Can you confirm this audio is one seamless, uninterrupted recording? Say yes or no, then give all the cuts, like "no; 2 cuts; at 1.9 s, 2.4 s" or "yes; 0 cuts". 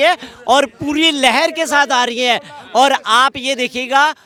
yes; 0 cuts